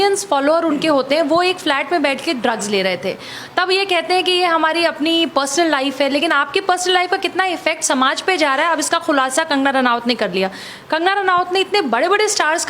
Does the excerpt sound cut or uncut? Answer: uncut